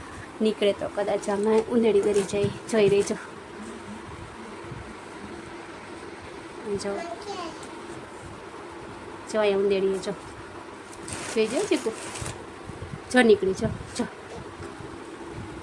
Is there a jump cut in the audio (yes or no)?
no